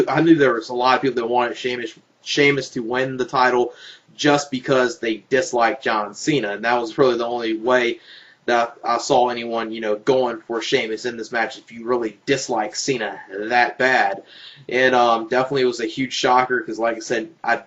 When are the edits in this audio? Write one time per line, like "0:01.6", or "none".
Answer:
0:06.0